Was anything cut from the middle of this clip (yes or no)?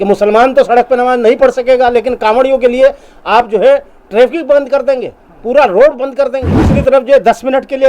yes